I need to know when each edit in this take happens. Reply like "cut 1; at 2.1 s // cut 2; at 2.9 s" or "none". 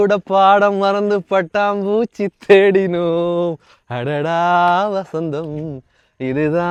none